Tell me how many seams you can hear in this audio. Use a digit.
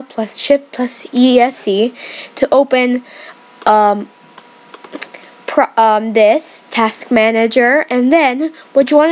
0